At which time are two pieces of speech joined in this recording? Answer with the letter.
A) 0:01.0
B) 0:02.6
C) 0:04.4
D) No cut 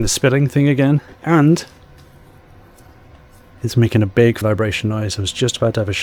C